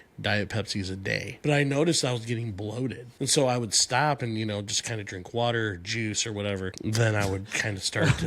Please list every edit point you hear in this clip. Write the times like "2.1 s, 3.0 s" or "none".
1.3 s, 3.0 s, 6.7 s